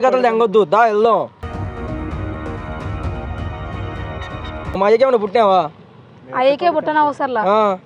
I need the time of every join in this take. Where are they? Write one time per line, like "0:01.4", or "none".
none